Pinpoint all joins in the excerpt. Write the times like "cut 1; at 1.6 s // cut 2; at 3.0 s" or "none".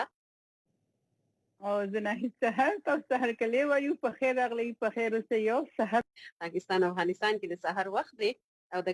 cut 1; at 6.0 s